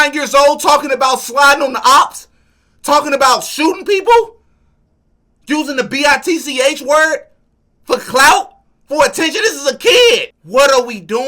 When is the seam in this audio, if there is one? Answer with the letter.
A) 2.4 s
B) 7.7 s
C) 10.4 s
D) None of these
C